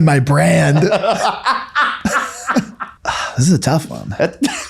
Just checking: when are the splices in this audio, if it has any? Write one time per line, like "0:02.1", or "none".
0:02.8